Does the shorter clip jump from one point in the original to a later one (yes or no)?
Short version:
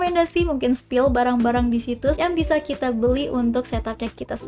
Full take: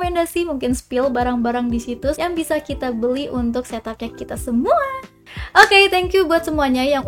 no